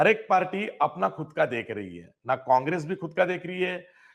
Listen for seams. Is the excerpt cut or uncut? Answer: uncut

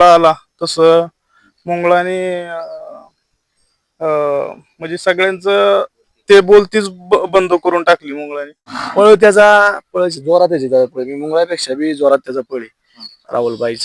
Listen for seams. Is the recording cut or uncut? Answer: cut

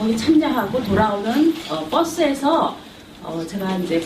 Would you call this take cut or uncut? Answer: cut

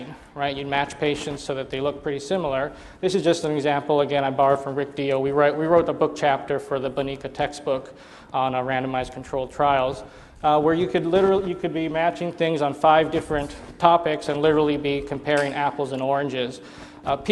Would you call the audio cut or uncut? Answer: cut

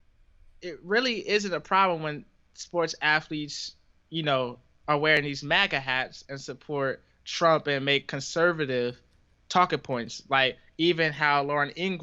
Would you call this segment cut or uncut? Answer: uncut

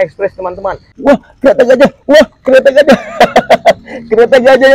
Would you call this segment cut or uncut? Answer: cut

